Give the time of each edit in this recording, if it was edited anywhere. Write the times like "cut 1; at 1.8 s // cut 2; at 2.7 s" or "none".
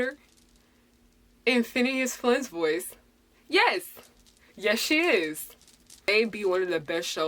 cut 1; at 6.1 s